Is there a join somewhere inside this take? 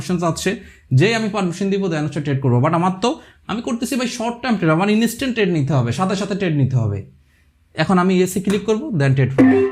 no; 0 cuts

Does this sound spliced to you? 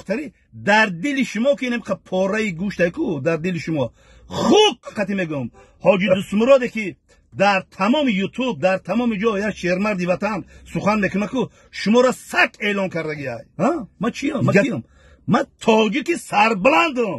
yes; 2 cuts; at 4.9 s, 13.4 s

